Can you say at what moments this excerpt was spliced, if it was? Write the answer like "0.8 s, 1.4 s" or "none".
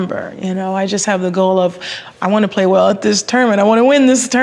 none